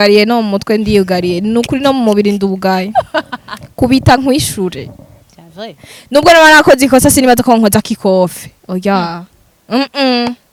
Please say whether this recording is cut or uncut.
uncut